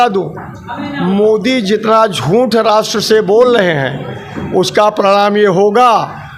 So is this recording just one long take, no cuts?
yes; 0 cuts

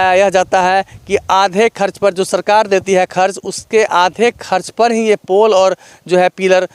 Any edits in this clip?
no; 0 cuts

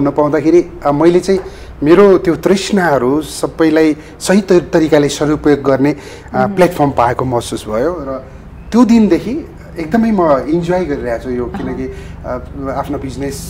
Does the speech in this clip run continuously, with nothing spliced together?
yes; 0 cuts

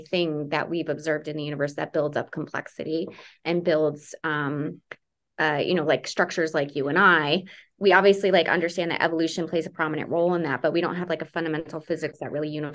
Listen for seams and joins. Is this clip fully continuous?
yes; 0 cuts

